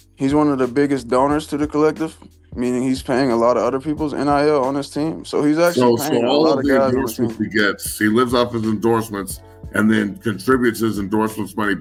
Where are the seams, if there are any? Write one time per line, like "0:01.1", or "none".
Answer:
none